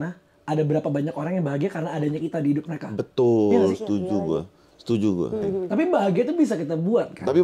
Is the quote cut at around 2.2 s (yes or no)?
no